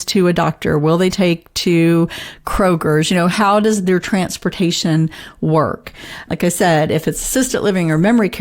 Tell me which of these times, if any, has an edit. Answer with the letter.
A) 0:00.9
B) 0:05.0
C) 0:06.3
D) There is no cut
C